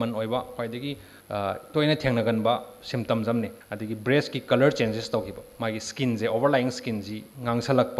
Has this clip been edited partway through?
yes; 2 cuts; at 1.1 s, 3.7 s

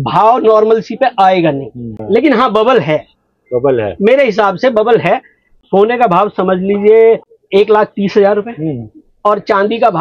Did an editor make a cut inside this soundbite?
yes; 3 cuts; at 1.9 s, 5.5 s, 7.3 s

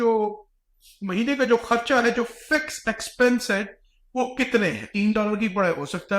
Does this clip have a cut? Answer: yes; 1 cut; at 4.9 s

